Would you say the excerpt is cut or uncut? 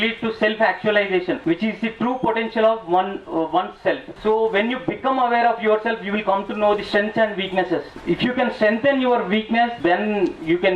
cut